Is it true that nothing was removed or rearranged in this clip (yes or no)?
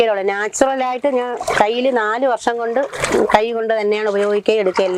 yes